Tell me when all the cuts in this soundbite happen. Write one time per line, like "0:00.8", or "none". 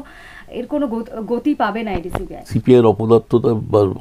0:02.5

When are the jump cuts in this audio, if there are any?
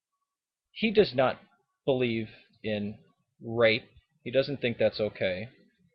0:03.0

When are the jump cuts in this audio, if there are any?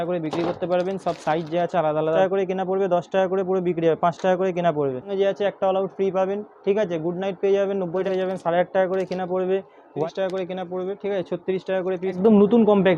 0:02.2
0:05.1
0:08.1
0:10.0
0:12.2

